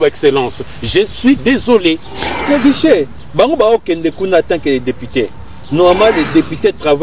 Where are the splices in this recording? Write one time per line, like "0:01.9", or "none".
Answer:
0:02.4